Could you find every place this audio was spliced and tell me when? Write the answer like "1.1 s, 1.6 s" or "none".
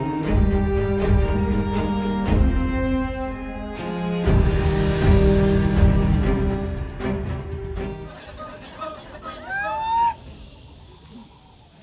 none